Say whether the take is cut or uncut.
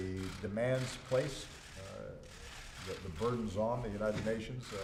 uncut